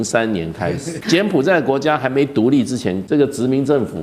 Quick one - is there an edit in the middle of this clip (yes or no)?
yes